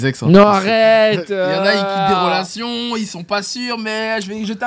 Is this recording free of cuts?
yes; 0 cuts

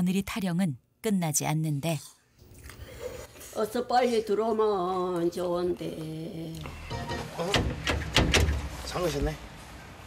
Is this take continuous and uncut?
no; 1 cut; at 6.8 s

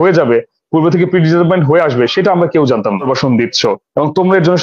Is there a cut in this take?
yes; 1 cut; at 3.0 s

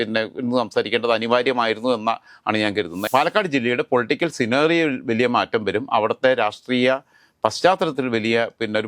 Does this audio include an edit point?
yes; 1 cut; at 3.0 s

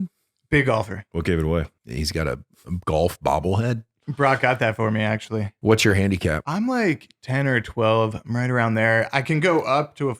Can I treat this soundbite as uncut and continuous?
no; 4 cuts; at 1.0 s, 1.8 s, 5.5 s, 6.4 s

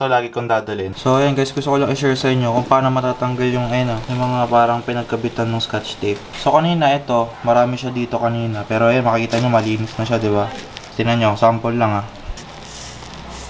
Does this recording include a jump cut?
yes; 3 cuts; at 0.9 s, 10.7 s, 12.4 s

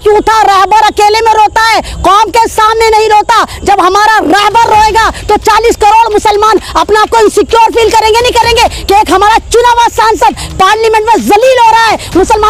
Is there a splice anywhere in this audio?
no; 0 cuts

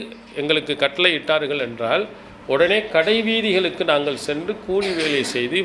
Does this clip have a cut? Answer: no; 0 cuts

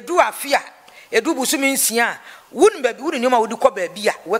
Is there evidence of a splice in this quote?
no; 0 cuts

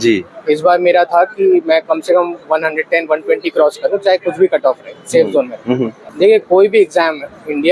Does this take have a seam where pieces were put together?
yes; 1 cut; at 6.0 s

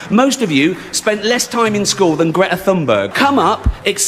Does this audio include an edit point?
yes; 1 cut; at 3.1 s

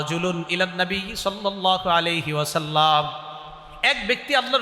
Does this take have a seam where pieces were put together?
no; 0 cuts

